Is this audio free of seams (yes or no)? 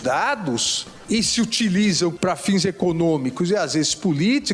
no